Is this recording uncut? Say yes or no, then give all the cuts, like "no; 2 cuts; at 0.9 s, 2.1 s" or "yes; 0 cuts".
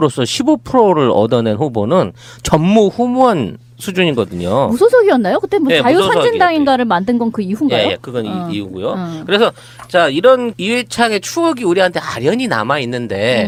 yes; 0 cuts